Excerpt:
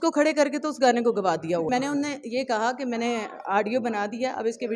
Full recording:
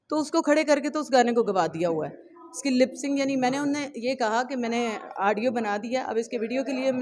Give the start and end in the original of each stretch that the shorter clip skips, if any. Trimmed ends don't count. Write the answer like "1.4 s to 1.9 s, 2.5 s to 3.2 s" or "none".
2.0 s to 3.4 s